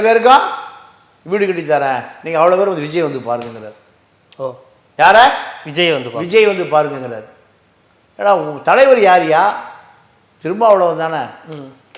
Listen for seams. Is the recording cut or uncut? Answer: uncut